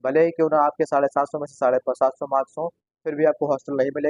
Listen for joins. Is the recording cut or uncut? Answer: uncut